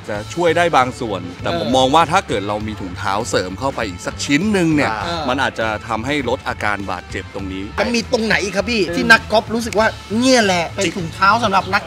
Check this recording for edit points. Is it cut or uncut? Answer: cut